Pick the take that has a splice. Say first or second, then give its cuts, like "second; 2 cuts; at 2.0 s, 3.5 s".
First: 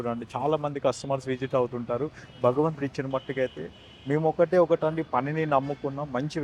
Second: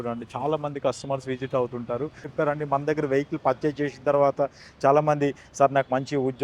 second; 1 cut; at 2.2 s